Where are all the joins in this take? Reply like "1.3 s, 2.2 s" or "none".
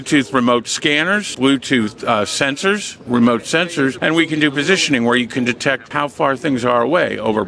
1.3 s, 4.0 s, 5.9 s